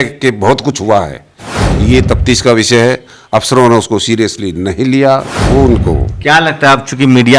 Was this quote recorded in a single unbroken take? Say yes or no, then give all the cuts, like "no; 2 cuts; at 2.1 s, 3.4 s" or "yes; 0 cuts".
no; 1 cut; at 5.3 s